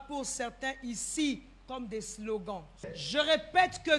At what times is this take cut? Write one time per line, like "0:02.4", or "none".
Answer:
0:02.8

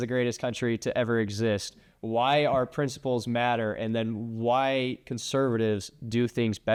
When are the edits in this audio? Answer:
none

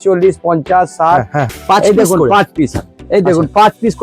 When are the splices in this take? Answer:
0:01.6

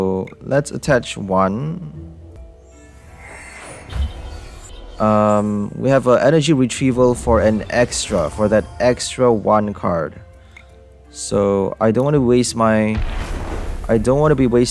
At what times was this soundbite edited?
0:02.4
0:04.7

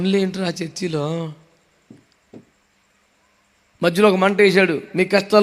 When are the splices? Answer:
none

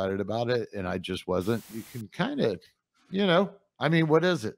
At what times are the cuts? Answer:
0:01.7

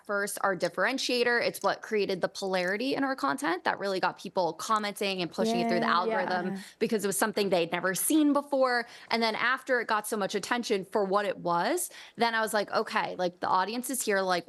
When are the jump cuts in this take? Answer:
none

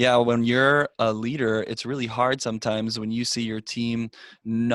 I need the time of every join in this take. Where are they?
0:00.9

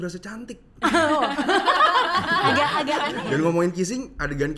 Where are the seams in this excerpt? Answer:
0:03.1

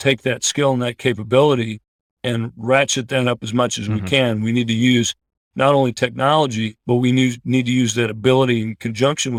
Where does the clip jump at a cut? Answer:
none

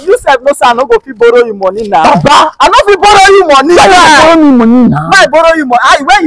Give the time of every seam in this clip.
none

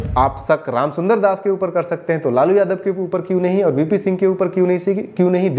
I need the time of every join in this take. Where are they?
none

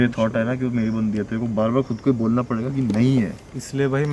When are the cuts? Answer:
none

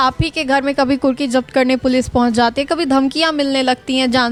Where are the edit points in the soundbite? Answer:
none

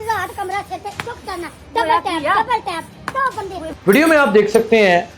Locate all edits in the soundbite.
0:03.7

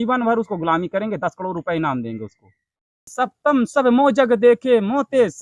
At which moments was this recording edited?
0:03.0

